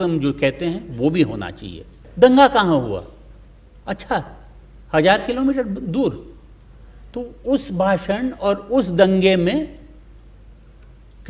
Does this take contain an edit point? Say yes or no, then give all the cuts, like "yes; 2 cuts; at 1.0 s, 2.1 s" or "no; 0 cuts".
yes; 1 cut; at 2.0 s